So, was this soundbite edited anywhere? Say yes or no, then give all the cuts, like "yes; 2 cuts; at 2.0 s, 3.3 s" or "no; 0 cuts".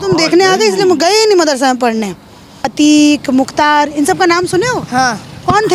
yes; 1 cut; at 2.6 s